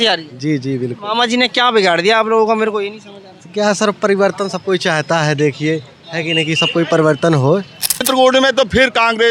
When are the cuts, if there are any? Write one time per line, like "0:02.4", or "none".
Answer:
0:08.0